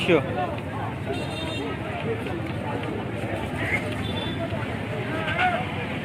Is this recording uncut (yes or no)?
yes